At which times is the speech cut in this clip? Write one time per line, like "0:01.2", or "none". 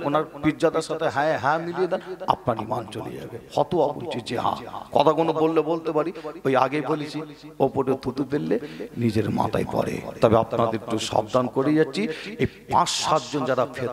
none